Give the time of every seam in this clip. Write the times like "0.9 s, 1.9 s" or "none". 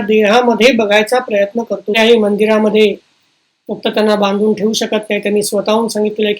2.0 s